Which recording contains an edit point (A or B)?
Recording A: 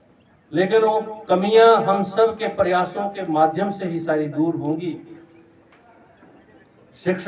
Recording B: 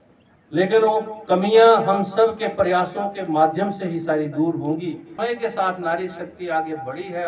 B